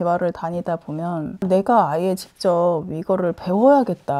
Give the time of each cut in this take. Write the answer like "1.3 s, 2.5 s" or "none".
1.4 s